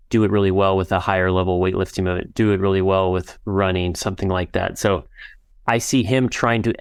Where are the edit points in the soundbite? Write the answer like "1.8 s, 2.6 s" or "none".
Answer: none